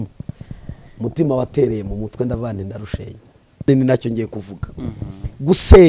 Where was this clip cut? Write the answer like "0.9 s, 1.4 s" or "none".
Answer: 3.7 s